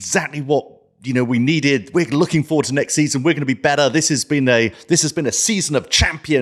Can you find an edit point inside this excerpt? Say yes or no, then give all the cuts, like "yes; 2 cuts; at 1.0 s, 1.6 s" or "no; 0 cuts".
no; 0 cuts